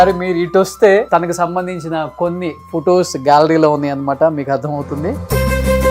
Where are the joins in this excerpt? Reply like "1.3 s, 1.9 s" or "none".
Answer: 1.1 s